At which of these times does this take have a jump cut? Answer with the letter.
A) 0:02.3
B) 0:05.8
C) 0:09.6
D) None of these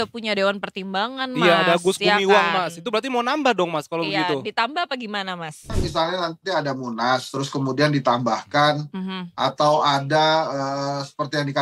B